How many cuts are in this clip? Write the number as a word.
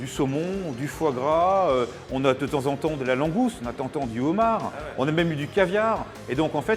zero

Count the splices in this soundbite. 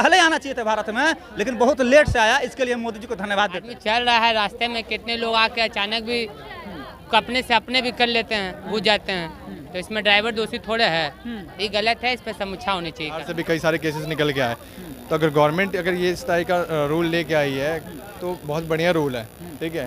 two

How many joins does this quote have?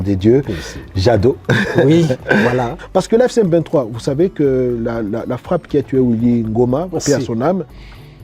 one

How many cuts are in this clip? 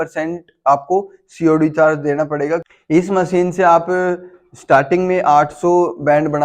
one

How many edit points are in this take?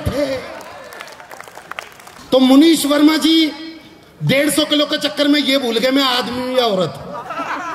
one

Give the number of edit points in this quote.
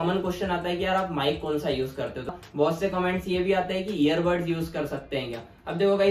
one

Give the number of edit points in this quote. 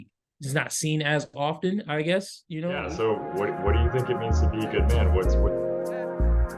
one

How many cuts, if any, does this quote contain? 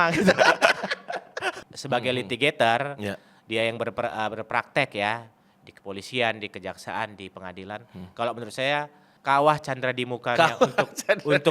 two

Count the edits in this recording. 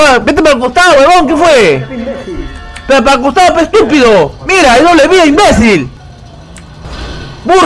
one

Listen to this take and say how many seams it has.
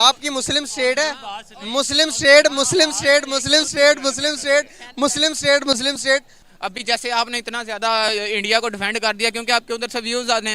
one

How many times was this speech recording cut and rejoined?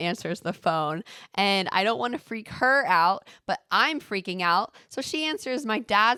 zero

